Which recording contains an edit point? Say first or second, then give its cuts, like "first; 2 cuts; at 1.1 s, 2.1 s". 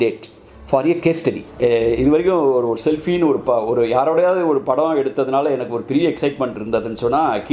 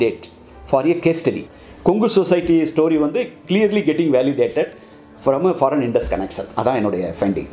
first; 1 cut; at 1.5 s